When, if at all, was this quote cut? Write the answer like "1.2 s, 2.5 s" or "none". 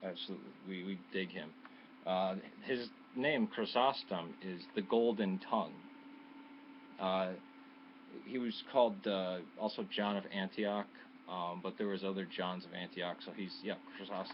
7.4 s